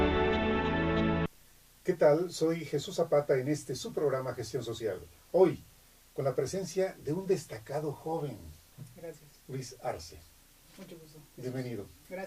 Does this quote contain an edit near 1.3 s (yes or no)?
yes